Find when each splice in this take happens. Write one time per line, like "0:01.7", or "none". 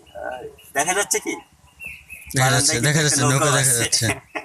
none